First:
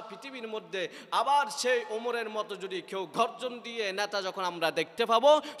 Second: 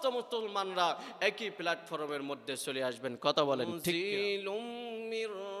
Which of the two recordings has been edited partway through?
second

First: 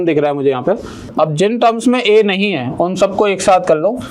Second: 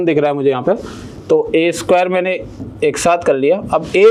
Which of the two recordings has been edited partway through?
first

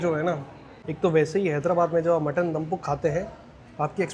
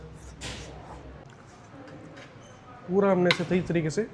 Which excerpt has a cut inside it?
second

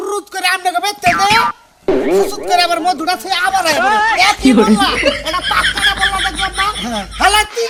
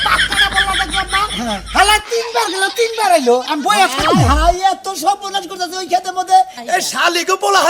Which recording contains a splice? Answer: second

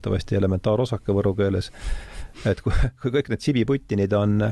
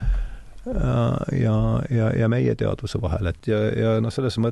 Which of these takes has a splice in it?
second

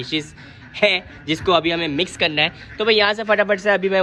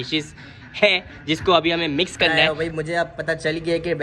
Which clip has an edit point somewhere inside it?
second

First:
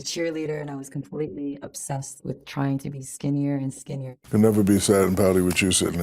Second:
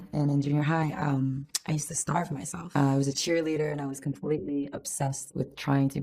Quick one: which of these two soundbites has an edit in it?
first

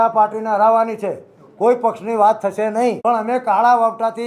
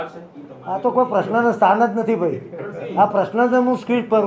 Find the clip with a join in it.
first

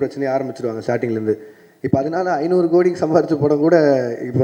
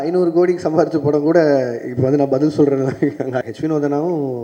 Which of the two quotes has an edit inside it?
second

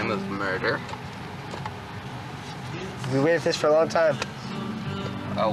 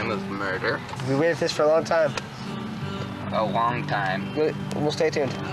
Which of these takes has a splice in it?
second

